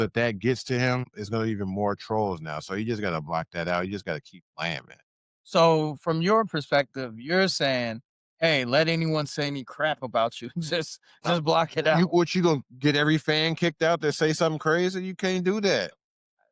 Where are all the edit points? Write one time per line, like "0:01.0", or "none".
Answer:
0:01.1